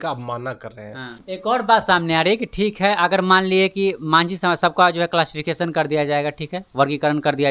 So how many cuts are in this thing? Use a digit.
1